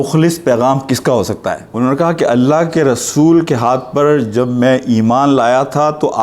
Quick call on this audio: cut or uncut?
cut